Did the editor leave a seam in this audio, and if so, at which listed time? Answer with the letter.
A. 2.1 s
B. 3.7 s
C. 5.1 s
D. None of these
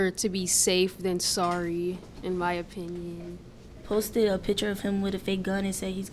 B